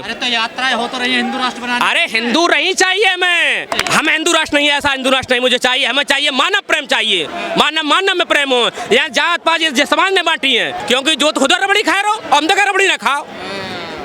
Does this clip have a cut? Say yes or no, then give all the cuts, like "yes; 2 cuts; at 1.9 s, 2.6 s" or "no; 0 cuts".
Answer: yes; 2 cuts; at 3.7 s, 10.8 s